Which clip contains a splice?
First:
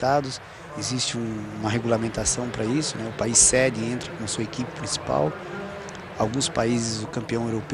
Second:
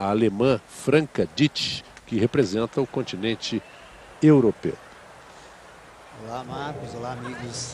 first; 1 cut; at 2.7 s

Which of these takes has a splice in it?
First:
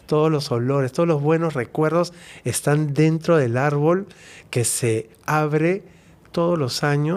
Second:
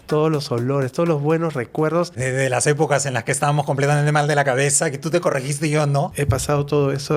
second; 2 cuts; at 2.2 s, 6.1 s

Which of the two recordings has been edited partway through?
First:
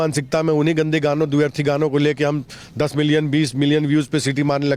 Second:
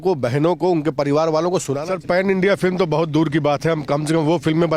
second; 1 cut; at 1.7 s

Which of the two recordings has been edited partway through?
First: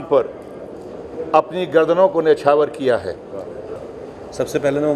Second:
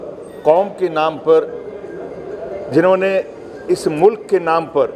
first; 1 cut; at 3.8 s

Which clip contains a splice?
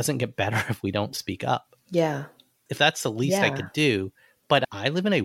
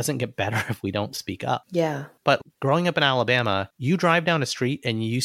second; 2 cuts; at 1.8 s, 3.7 s

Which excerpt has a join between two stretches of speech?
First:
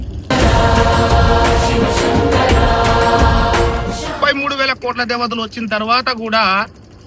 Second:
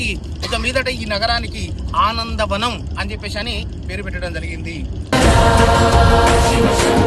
first; 1 cut; at 4.1 s

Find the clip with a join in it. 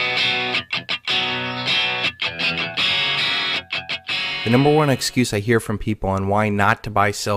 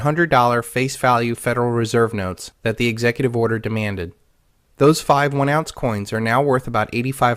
second; 1 cut; at 5.7 s

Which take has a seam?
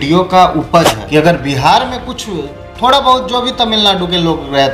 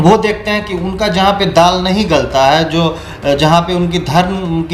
first; 1 cut; at 1.0 s

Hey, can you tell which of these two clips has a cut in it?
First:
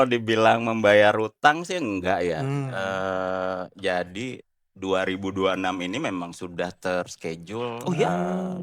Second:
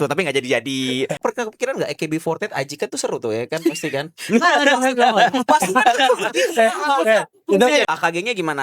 second; 2 cuts; at 1.2 s, 7.8 s

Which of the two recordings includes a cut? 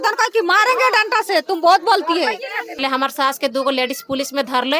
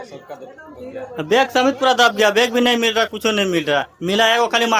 first; 1 cut; at 2.8 s

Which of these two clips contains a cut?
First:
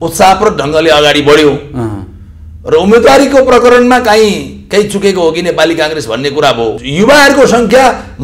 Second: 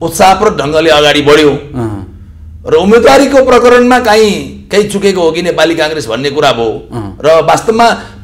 first; 1 cut; at 6.8 s

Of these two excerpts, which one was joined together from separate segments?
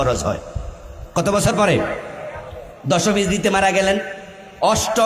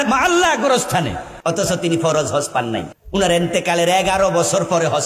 second; 2 cuts; at 1.2 s, 3.0 s

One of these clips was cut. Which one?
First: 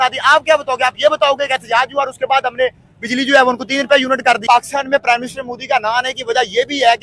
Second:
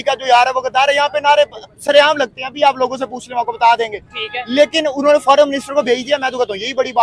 first; 1 cut; at 4.4 s

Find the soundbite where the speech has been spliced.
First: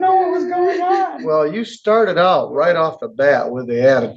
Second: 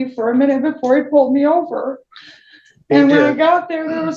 first; 1 cut; at 1.2 s

